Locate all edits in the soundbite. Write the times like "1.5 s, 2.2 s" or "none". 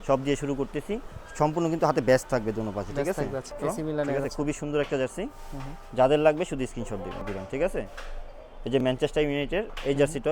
3.5 s, 7.2 s